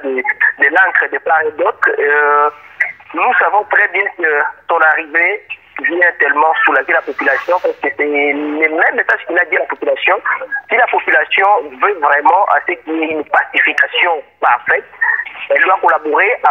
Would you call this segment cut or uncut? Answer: uncut